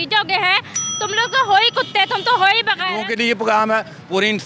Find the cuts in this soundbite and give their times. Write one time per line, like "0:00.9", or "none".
0:02.9